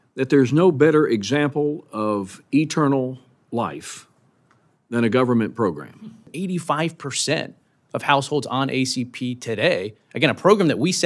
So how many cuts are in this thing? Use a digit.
1